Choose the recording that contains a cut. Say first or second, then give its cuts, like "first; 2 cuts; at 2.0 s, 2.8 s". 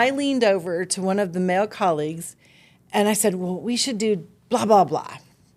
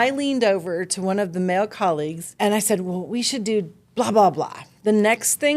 second; 2 cuts; at 2.2 s, 4.6 s